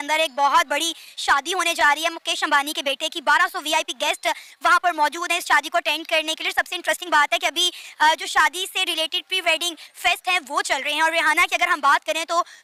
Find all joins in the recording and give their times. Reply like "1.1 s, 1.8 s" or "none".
none